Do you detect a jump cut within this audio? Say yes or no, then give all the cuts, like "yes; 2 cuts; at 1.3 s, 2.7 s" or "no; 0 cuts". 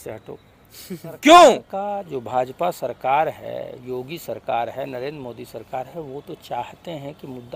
yes; 1 cut; at 1.7 s